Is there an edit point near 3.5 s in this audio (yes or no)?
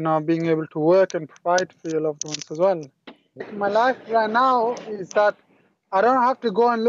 yes